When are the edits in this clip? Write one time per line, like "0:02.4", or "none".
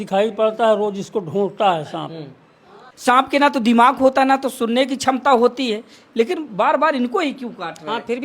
0:02.9